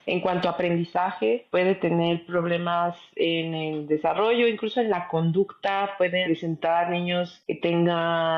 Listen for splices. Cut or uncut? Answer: uncut